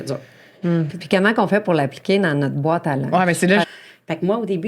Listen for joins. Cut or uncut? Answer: cut